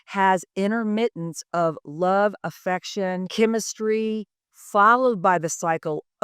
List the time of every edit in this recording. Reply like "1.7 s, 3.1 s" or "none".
3.3 s

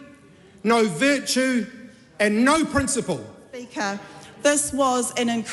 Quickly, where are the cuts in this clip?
3.7 s

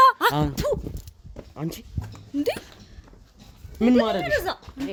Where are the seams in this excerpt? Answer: none

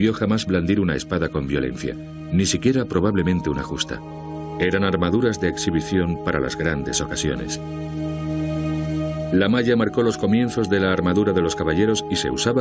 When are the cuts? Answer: none

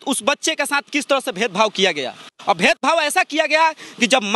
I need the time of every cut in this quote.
none

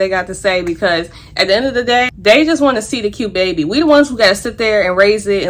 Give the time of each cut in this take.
2.1 s

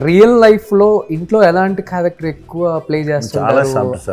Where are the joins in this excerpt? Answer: none

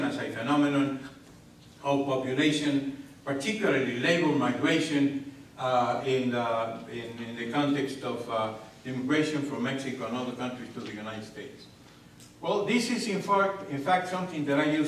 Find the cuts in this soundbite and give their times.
8.2 s

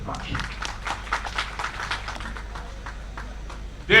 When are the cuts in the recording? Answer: 2.1 s

